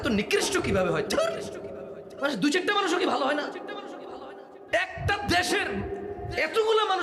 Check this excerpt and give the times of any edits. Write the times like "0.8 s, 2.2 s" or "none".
none